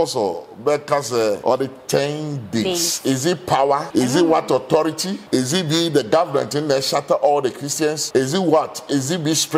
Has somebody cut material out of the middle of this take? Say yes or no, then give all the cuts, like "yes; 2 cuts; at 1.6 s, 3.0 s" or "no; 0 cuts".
yes; 4 cuts; at 1.4 s, 3.9 s, 5.1 s, 8.0 s